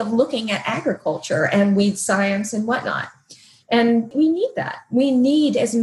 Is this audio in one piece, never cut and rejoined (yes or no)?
no